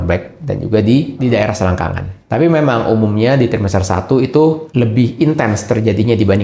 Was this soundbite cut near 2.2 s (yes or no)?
yes